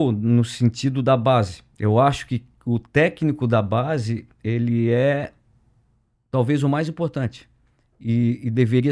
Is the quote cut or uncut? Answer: uncut